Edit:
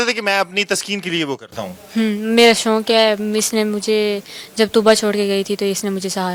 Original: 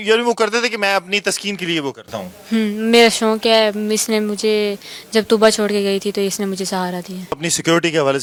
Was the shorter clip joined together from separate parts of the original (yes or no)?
no